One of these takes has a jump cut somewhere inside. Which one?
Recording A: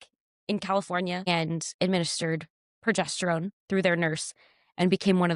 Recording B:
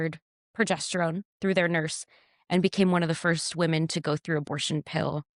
A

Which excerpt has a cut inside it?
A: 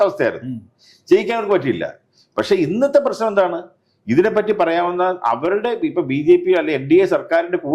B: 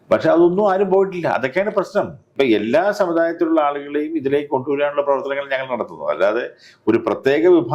B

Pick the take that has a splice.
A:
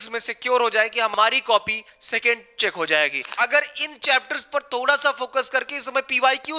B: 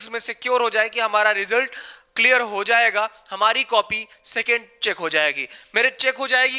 A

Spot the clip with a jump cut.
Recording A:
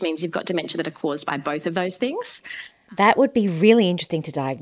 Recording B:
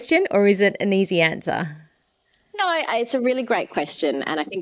A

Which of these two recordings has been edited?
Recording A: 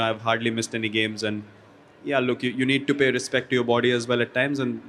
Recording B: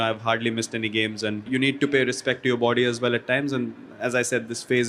B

